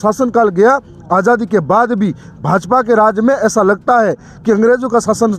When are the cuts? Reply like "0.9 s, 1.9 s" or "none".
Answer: none